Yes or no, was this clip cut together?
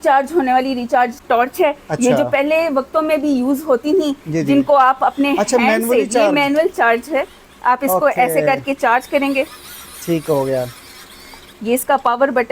yes